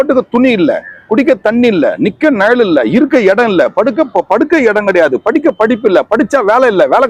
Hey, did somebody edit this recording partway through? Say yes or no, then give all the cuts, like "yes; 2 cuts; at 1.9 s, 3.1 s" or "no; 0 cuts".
no; 0 cuts